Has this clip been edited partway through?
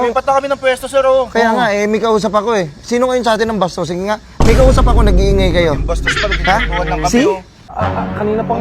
yes; 1 cut; at 7.6 s

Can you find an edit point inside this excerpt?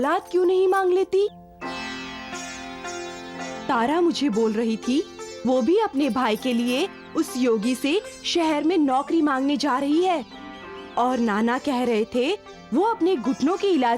yes; 1 cut; at 3.5 s

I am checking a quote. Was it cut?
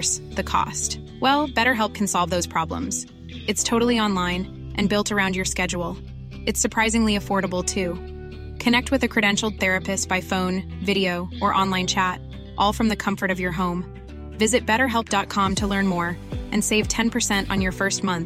no; 0 cuts

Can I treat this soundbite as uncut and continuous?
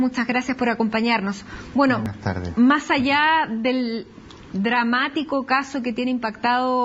yes; 0 cuts

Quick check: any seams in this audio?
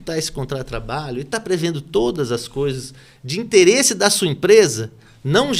no; 0 cuts

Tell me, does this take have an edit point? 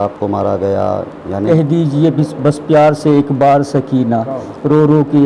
yes; 1 cut; at 1.5 s

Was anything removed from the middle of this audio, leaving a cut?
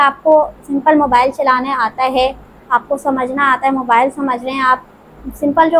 no; 0 cuts

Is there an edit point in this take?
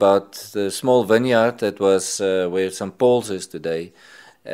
no; 0 cuts

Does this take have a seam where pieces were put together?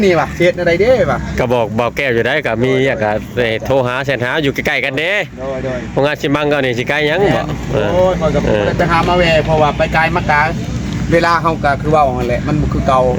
no; 0 cuts

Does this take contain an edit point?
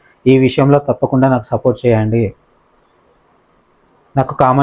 no; 0 cuts

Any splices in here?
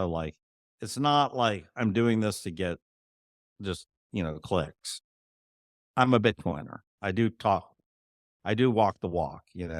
yes; 1 cut; at 6.9 s

